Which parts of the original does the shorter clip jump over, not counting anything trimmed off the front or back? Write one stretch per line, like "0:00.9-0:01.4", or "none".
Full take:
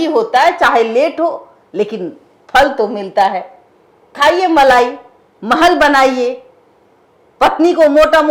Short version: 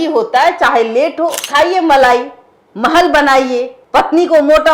0:01.4-0:04.1
0:06.4-0:07.2